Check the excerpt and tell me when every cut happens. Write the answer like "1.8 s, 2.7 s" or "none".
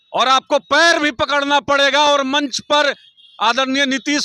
none

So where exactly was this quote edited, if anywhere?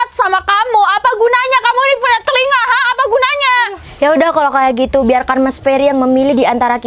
3.8 s

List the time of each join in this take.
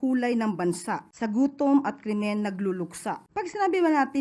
1.1 s, 3.2 s

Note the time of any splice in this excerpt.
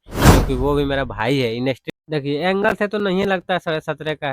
1.8 s

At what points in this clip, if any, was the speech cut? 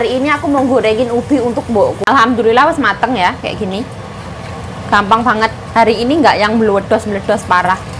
2.0 s

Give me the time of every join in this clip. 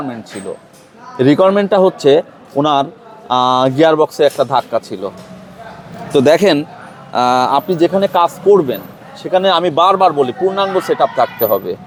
none

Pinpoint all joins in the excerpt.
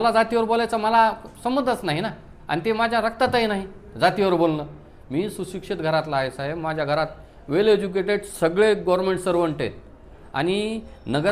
none

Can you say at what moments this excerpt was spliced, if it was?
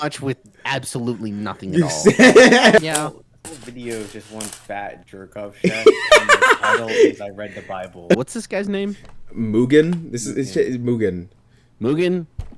2.8 s, 8.2 s

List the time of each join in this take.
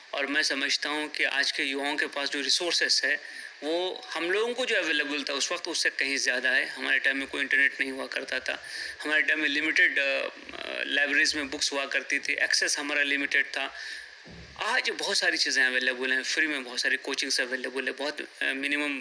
none

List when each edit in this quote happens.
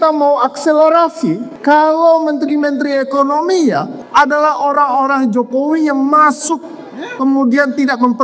1.5 s, 4.0 s

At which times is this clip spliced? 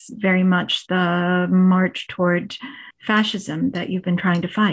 none

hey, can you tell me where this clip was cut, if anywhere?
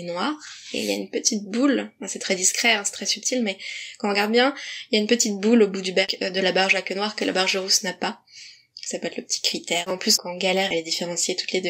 9.9 s

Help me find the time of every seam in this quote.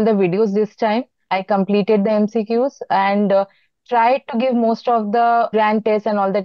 5.5 s

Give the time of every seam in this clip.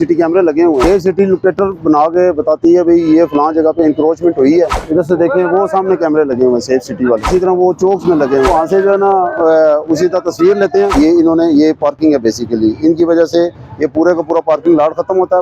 0.8 s, 4.8 s, 7.3 s, 8.5 s, 10.9 s

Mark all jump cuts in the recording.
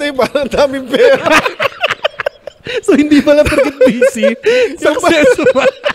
none

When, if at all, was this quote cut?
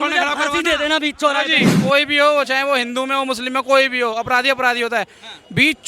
1.6 s

